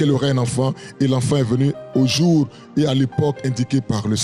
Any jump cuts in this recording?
no; 0 cuts

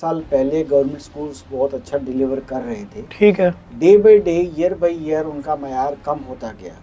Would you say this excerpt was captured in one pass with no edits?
yes; 0 cuts

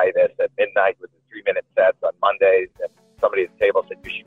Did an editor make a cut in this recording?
no; 0 cuts

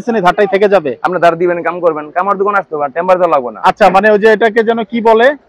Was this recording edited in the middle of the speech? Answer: no; 0 cuts

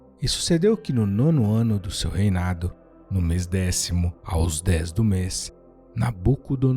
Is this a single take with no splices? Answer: no; 1 cut; at 4.2 s

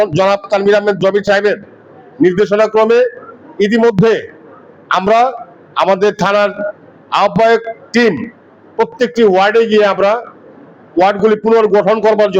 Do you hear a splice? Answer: no; 0 cuts

